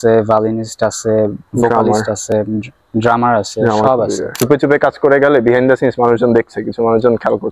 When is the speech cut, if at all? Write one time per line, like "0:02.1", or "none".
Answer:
0:04.4